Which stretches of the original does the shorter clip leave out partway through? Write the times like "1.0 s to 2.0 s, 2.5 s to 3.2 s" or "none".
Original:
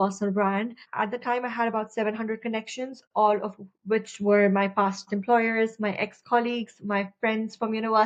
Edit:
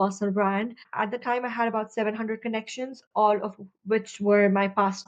none